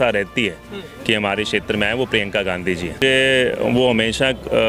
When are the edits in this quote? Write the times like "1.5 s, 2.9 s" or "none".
3.0 s